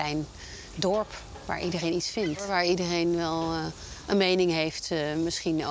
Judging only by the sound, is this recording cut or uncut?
cut